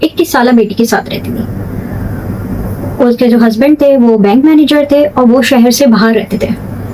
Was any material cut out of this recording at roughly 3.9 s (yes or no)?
no